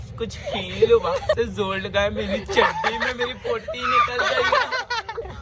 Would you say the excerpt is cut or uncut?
cut